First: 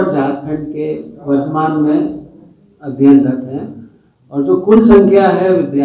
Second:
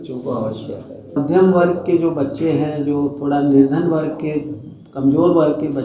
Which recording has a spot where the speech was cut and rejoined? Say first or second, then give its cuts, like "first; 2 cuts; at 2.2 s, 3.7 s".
second; 1 cut; at 1.2 s